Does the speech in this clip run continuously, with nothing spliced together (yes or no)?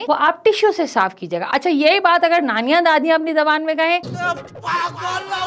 yes